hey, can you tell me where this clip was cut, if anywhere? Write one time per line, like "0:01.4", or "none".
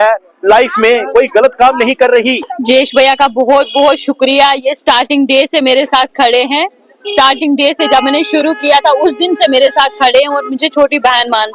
0:02.5